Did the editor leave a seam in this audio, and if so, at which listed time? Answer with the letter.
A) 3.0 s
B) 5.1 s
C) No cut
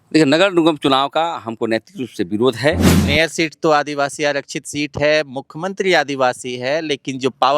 A